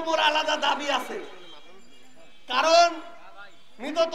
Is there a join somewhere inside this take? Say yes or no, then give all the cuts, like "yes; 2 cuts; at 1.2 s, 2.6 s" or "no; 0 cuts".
no; 0 cuts